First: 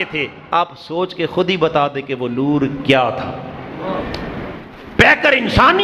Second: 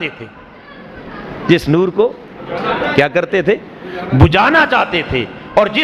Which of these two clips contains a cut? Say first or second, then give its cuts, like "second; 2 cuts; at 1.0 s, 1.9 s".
first; 1 cut; at 4.6 s